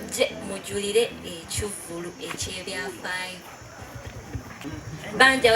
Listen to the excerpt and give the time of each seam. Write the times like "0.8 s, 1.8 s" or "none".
4.6 s